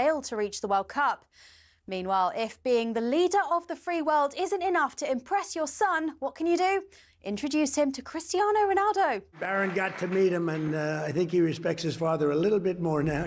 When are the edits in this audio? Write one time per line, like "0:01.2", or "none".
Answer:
none